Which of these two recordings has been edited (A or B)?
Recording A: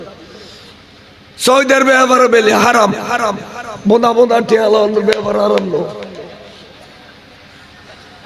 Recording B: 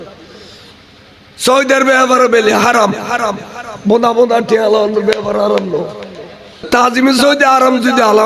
B